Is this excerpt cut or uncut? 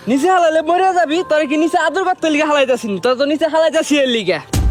uncut